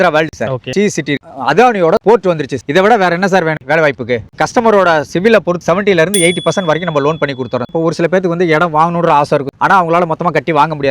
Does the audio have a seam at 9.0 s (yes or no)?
no